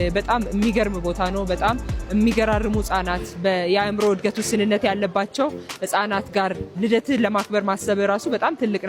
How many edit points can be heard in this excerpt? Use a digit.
0